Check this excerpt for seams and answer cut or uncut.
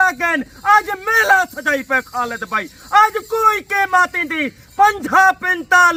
uncut